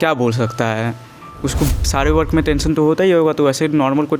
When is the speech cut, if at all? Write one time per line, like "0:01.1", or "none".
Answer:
0:01.8